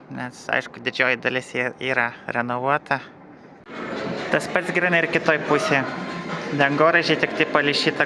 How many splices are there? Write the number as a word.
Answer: one